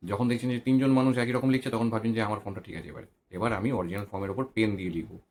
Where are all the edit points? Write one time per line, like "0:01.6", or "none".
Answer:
none